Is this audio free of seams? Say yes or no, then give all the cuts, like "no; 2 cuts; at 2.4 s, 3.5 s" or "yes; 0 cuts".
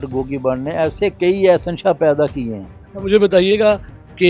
yes; 0 cuts